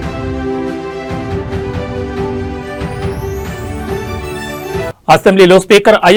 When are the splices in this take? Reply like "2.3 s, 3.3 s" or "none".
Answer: none